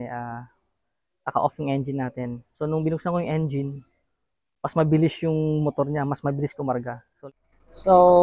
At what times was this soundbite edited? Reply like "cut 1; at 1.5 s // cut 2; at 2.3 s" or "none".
cut 1; at 7.2 s